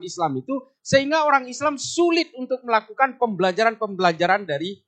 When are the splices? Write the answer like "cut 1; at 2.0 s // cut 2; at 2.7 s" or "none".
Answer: none